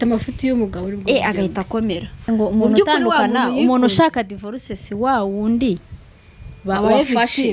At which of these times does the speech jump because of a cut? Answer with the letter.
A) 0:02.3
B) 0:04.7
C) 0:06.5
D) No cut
A